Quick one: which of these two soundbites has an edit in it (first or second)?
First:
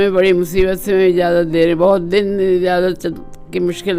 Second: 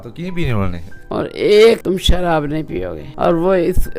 second